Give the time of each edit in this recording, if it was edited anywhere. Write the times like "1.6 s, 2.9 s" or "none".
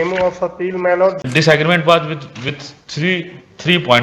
1.2 s